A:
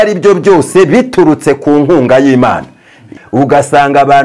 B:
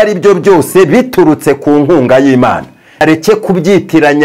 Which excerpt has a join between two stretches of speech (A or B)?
B